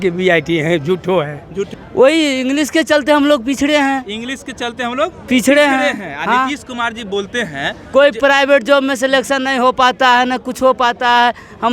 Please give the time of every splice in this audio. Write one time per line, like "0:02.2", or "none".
0:01.7

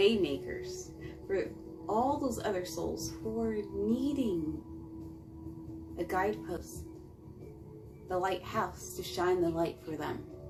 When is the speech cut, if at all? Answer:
none

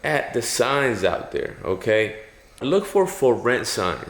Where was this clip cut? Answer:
0:02.6

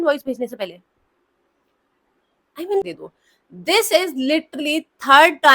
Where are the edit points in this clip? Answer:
0:02.8

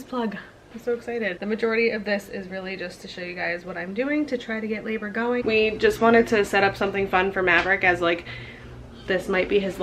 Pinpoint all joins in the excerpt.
0:01.3
0:05.4

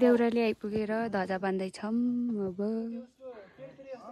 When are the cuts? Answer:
none

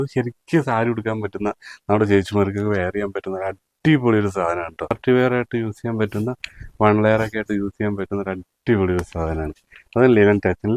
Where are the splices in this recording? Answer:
0:05.0

